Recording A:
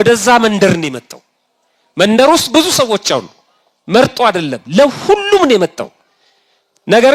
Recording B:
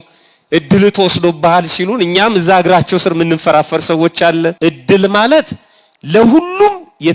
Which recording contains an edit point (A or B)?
B